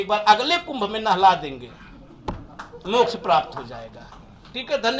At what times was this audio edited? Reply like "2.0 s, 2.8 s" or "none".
none